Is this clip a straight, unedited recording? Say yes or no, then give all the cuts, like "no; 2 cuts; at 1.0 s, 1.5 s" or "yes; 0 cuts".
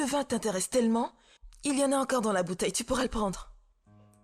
yes; 0 cuts